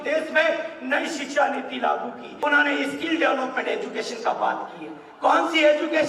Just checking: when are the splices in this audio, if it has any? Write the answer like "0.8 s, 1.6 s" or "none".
2.2 s